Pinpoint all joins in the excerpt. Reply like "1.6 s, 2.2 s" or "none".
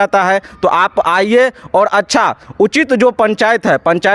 none

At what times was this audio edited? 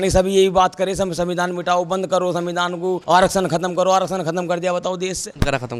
none

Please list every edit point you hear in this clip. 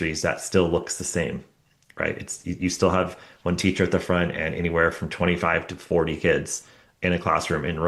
none

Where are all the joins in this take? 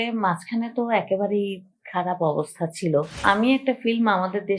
3.2 s

